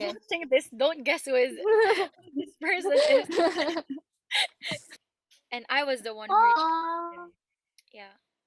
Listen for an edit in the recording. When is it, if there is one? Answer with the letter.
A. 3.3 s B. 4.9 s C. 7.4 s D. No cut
B